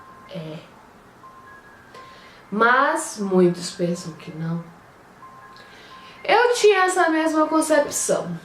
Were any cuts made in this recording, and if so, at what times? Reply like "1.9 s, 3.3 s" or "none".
1.5 s